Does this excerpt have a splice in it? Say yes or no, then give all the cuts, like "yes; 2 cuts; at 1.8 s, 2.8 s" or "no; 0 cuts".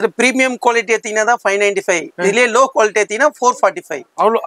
no; 0 cuts